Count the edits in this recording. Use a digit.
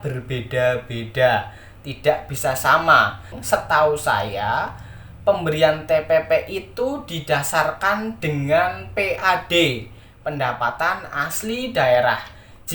1